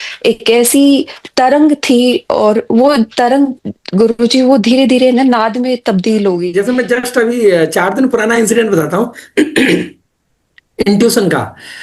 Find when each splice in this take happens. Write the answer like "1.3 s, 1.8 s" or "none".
6.5 s

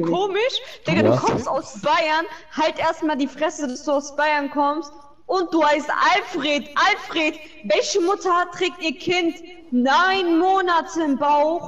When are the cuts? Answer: none

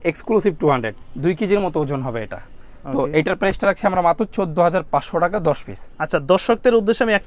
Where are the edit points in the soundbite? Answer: none

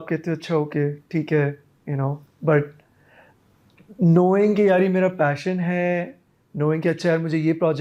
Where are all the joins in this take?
none

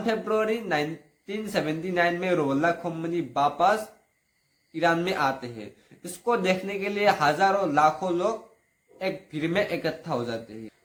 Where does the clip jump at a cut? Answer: none

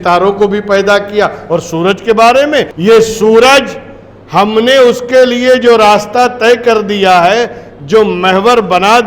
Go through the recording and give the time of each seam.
2.7 s

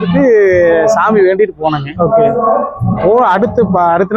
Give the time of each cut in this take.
none

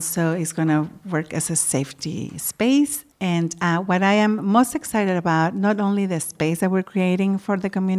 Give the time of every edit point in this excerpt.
3.0 s

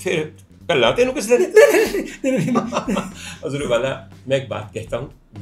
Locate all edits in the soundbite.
none

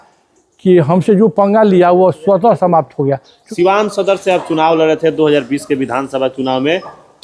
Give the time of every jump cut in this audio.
3.3 s

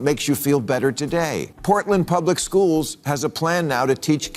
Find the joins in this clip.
1.4 s

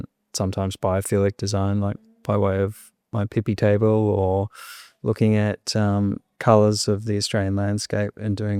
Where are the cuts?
none

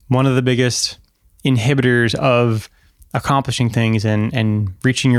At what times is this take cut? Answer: none

